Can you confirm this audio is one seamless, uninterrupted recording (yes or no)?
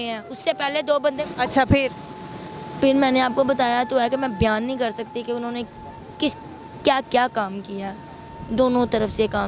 no